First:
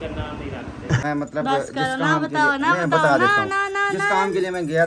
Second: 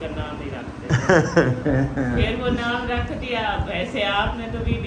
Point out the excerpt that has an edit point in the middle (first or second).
first